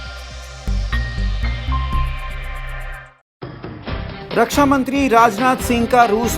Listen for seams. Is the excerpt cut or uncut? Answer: cut